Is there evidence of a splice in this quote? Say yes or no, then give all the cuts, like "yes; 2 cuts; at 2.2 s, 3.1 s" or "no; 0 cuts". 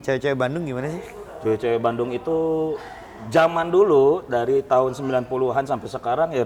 no; 0 cuts